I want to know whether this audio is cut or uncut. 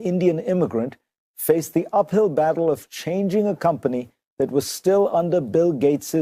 cut